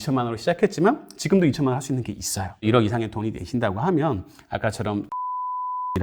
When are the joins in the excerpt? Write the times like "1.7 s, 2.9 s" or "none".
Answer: 2.6 s